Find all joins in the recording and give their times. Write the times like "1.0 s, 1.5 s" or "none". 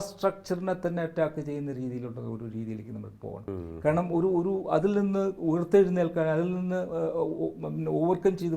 3.5 s

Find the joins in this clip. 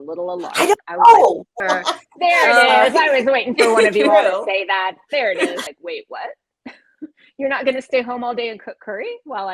1.6 s, 5.6 s

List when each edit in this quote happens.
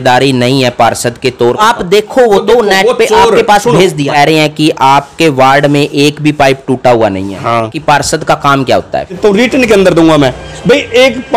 1.6 s, 4.1 s, 7.7 s, 9.1 s

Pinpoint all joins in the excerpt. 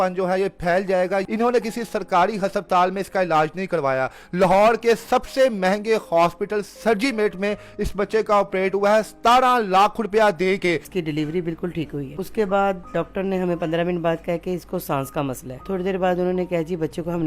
1.3 s, 10.9 s, 12.1 s, 15.6 s

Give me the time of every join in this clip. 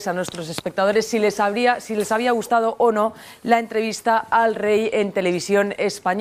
none

